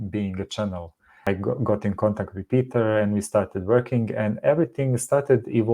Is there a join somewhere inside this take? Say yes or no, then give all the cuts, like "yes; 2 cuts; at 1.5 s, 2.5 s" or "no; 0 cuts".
yes; 1 cut; at 1.3 s